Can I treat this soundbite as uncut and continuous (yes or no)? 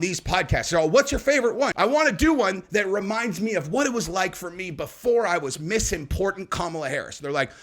no